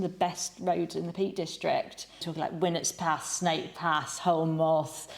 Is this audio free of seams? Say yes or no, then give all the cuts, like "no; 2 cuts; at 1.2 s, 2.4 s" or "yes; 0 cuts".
no; 1 cut; at 2.3 s